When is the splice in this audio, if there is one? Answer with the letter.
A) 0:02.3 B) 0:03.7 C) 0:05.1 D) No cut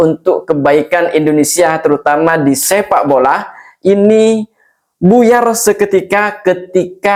D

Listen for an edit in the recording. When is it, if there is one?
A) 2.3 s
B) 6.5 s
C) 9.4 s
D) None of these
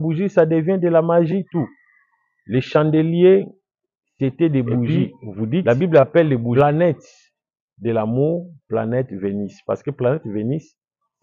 B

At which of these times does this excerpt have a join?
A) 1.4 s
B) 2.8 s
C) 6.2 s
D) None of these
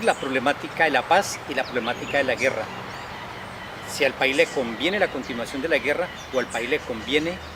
D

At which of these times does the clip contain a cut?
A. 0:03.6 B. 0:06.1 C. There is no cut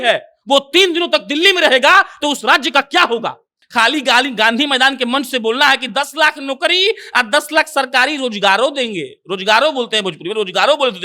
A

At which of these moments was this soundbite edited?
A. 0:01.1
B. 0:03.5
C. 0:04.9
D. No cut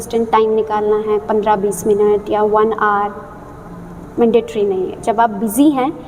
D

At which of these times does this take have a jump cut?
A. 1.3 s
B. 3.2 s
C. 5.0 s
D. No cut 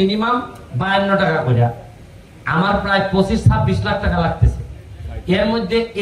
D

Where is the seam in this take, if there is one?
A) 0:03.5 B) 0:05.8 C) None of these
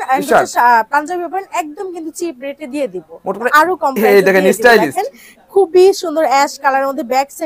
A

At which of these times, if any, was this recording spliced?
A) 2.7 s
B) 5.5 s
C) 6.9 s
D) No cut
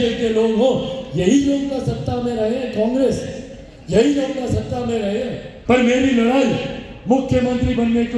B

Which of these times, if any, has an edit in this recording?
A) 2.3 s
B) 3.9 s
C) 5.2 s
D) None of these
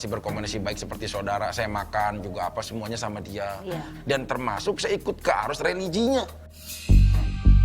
B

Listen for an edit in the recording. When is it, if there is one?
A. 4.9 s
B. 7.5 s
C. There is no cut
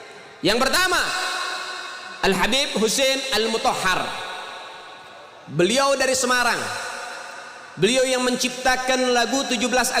C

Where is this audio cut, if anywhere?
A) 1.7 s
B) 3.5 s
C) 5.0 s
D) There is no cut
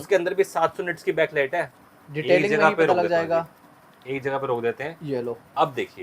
A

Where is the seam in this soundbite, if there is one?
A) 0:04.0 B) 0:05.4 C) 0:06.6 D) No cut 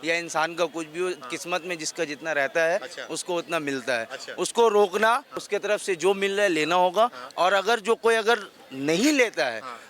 B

